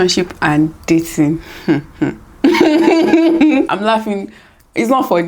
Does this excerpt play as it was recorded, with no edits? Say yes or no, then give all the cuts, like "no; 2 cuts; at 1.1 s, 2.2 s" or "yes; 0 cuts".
no; 1 cut; at 3.7 s